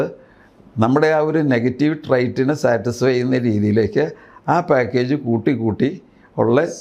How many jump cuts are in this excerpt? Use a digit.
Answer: 0